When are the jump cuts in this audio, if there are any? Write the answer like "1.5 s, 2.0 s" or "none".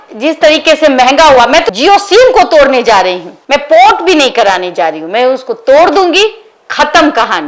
none